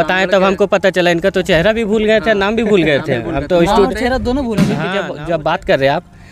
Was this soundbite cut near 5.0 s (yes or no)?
yes